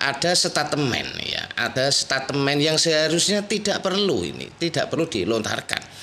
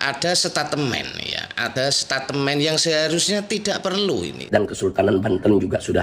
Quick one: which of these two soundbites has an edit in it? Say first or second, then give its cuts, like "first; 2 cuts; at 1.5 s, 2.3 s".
second; 1 cut; at 4.4 s